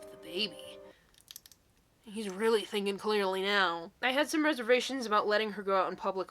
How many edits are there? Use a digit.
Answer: 1